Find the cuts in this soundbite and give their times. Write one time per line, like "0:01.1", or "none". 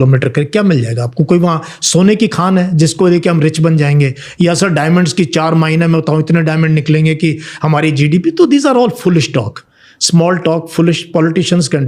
none

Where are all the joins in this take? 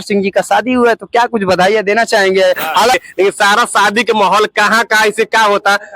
0:02.9

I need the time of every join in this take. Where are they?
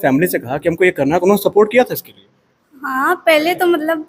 none

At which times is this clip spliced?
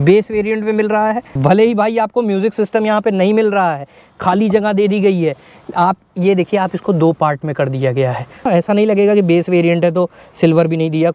0:01.3
0:08.5

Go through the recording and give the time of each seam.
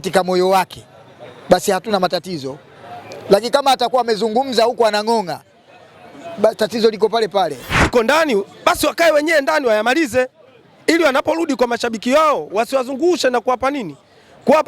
0:07.9

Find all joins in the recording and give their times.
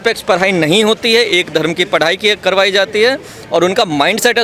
none

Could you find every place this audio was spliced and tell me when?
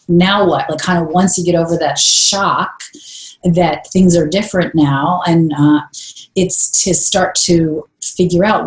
none

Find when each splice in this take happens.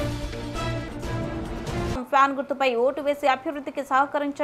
0:01.9

